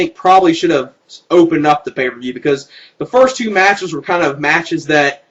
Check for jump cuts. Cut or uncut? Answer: uncut